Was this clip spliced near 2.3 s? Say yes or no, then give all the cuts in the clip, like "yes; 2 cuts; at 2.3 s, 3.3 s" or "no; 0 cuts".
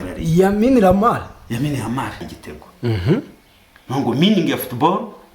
yes; 1 cut; at 2.3 s